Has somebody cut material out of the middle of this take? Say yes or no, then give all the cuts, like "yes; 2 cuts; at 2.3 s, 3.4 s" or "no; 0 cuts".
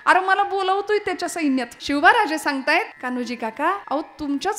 yes; 3 cuts; at 1.8 s, 2.9 s, 3.8 s